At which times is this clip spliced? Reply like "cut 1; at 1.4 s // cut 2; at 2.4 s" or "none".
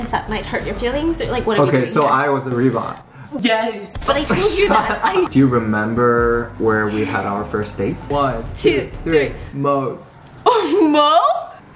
cut 1; at 5.3 s // cut 2; at 8.0 s